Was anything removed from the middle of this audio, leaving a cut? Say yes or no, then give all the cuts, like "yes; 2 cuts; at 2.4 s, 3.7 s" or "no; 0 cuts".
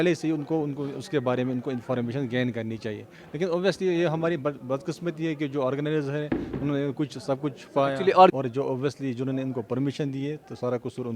yes; 1 cut; at 8.3 s